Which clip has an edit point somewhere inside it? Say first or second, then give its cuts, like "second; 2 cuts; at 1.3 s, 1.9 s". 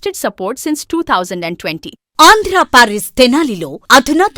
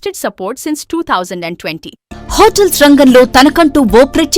second; 1 cut; at 2.0 s